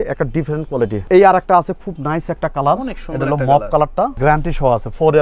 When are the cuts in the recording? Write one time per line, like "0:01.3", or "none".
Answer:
0:01.0
0:04.2